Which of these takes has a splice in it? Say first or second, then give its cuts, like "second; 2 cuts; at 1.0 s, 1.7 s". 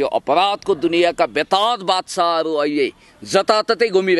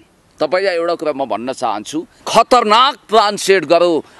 second; 1 cut; at 2.1 s